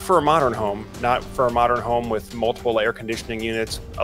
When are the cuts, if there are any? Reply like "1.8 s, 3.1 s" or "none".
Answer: none